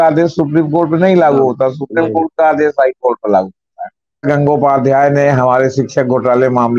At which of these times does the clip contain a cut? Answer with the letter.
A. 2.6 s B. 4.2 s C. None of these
B